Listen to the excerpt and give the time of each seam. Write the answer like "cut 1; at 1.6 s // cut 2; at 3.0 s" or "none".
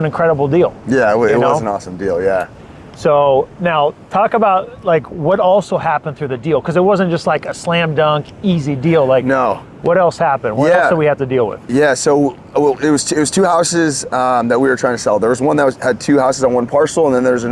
none

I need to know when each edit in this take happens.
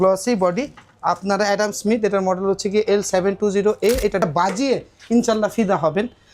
cut 1; at 4.2 s

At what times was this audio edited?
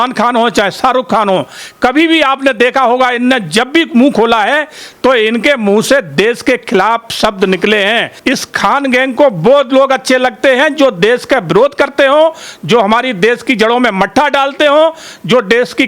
cut 1; at 8.1 s

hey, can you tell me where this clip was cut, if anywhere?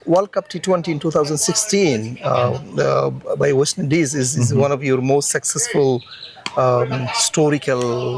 none

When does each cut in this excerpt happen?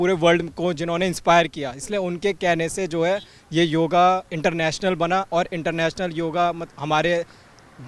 none

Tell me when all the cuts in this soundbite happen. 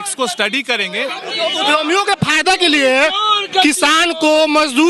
none

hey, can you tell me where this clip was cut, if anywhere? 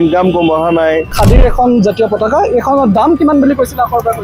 cut 1; at 1.1 s

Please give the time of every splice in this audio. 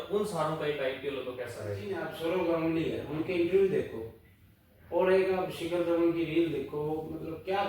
cut 1; at 2.0 s

